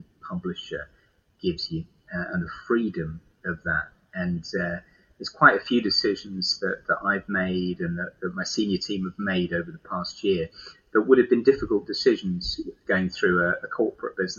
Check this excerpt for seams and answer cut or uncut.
uncut